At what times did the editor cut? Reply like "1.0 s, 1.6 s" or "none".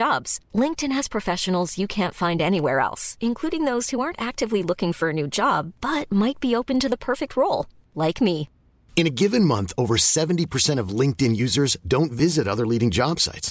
none